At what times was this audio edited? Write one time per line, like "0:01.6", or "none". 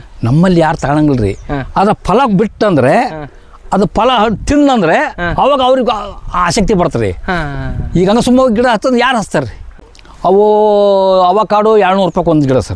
none